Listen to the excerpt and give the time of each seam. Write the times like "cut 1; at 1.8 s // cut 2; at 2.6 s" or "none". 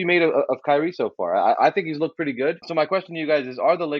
cut 1; at 2.7 s